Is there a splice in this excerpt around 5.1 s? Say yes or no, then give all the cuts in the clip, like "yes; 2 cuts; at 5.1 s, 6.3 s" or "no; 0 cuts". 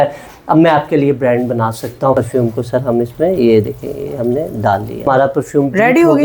yes; 2 cuts; at 2.1 s, 5.1 s